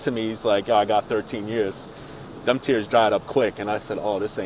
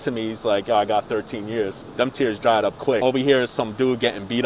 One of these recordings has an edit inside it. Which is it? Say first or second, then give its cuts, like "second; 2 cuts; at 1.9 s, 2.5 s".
second; 2 cuts; at 1.8 s, 3.0 s